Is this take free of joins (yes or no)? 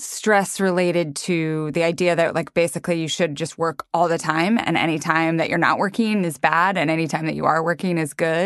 yes